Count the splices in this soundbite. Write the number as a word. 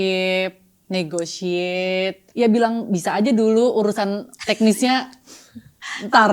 one